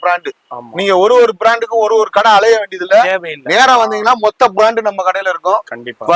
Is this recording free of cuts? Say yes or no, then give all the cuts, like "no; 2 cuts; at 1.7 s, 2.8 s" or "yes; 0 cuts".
yes; 0 cuts